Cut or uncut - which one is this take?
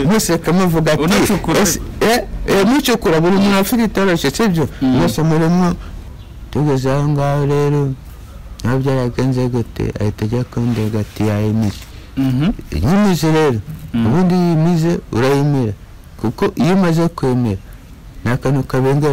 cut